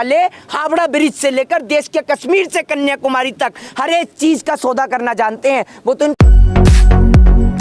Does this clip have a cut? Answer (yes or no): yes